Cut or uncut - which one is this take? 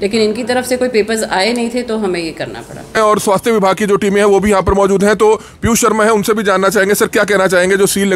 cut